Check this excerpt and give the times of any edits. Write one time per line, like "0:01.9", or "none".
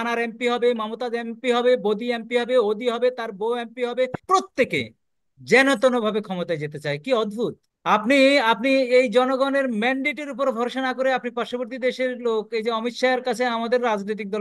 0:04.2
0:07.7